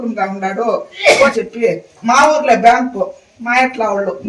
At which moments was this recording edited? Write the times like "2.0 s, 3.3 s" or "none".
1.3 s